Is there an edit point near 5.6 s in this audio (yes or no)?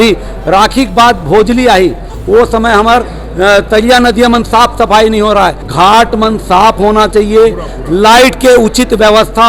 yes